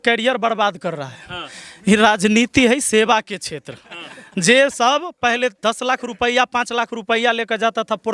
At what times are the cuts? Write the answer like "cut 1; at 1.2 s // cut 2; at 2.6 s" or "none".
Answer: none

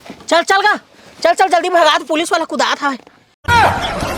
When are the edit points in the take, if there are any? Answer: cut 1; at 3.1 s

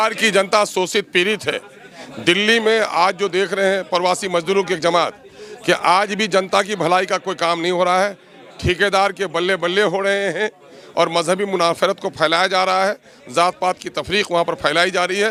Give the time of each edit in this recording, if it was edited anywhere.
none

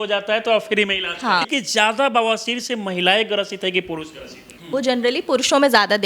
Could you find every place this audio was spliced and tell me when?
cut 1; at 1.5 s // cut 2; at 4.6 s

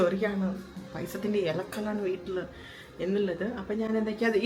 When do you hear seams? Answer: none

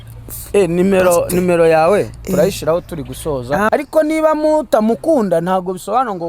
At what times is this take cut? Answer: cut 1; at 3.7 s

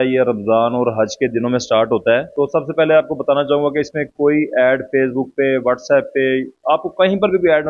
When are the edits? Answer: none

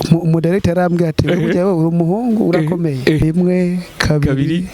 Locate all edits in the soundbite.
cut 1; at 3.2 s

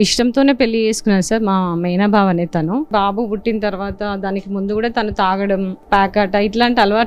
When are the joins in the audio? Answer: cut 1; at 2.9 s // cut 2; at 5.8 s

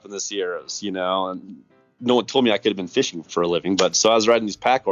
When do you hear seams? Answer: cut 1; at 3.2 s

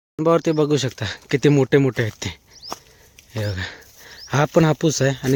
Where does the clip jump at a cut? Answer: none

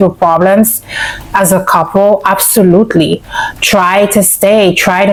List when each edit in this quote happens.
none

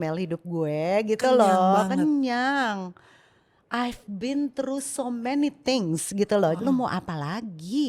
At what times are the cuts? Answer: cut 1; at 6.6 s

